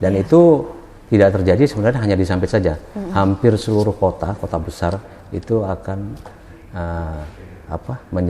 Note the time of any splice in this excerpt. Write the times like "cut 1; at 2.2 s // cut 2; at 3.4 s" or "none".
none